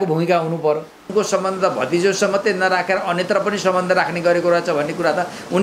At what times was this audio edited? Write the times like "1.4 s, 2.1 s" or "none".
1.0 s